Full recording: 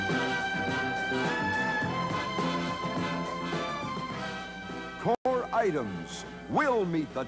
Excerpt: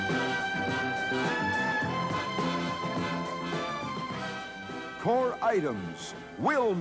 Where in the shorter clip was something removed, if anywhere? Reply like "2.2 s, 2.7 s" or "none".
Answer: 5.1 s